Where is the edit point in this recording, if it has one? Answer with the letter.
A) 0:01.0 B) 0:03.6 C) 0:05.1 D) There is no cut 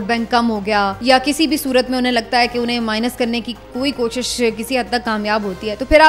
A